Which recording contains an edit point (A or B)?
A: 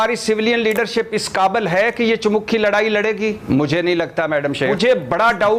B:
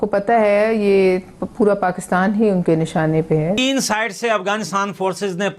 B